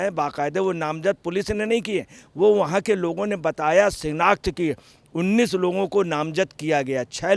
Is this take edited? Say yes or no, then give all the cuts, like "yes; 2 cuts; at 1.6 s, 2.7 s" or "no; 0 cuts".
no; 0 cuts